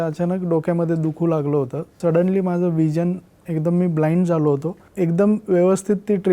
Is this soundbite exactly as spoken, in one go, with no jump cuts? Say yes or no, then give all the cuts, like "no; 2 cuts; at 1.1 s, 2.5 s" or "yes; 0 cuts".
no; 2 cuts; at 1.8 s, 4.8 s